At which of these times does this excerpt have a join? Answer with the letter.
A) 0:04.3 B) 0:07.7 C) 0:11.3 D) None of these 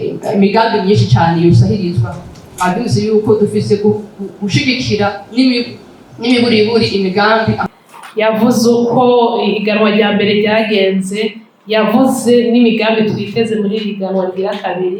B